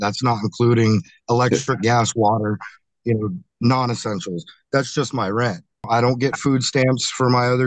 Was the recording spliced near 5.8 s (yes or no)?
yes